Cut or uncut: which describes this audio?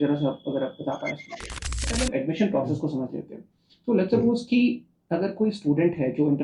cut